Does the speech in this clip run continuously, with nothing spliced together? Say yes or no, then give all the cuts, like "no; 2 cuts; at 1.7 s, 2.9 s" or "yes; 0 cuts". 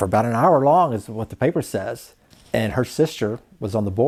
yes; 0 cuts